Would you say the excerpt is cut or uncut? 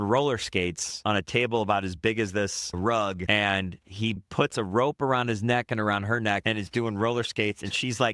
cut